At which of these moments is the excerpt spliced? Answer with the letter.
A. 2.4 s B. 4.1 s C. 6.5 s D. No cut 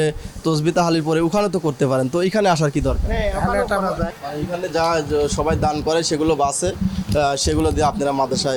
B